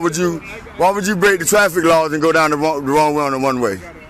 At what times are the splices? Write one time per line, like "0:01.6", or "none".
none